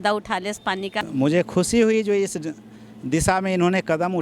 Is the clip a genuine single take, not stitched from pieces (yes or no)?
no